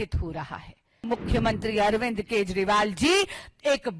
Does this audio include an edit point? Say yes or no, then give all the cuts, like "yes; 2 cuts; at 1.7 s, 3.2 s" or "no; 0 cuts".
yes; 1 cut; at 1.1 s